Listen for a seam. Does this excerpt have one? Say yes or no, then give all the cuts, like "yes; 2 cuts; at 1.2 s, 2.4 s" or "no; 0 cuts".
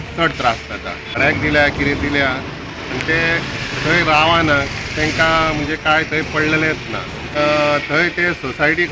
yes; 2 cuts; at 1.2 s, 7.3 s